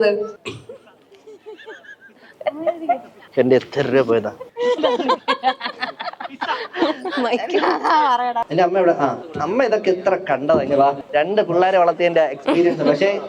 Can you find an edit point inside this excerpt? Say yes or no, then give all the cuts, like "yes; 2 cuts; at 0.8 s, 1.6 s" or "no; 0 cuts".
yes; 2 cuts; at 2.2 s, 8.4 s